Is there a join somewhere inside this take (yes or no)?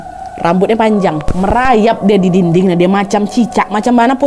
yes